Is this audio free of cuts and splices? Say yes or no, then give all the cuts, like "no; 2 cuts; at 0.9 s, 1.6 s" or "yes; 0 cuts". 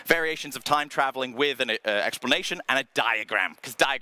yes; 0 cuts